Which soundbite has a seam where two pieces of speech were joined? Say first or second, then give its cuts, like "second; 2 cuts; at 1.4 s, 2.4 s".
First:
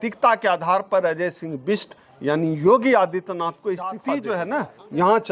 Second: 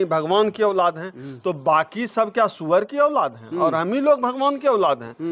first; 1 cut; at 4.1 s